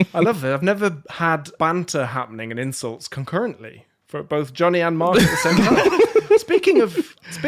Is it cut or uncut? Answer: cut